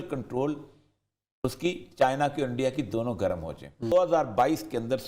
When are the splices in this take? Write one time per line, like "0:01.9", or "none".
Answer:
0:03.9

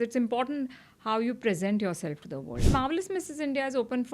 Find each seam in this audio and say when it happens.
0:02.7

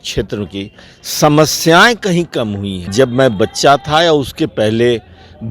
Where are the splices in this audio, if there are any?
0:02.9

